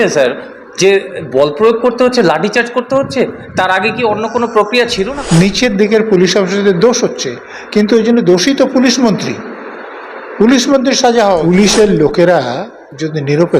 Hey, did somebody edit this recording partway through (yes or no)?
yes